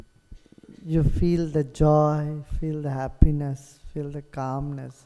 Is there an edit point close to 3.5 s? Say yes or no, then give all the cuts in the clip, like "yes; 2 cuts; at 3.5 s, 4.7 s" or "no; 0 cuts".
yes; 1 cut; at 3.5 s